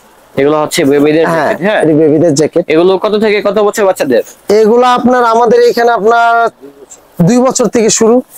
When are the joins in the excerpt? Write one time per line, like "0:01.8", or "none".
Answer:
none